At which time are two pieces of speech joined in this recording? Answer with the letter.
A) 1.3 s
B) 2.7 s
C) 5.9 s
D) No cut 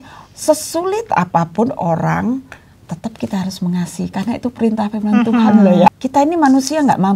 C